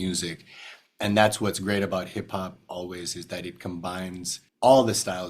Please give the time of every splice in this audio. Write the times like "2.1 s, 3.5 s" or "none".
4.4 s